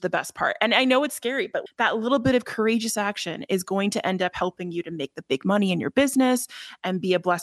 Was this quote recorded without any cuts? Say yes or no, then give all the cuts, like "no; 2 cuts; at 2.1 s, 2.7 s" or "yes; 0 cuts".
yes; 0 cuts